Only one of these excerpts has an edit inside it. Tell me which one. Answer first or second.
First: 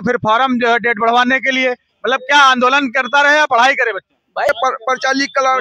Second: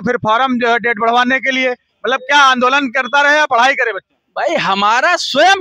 first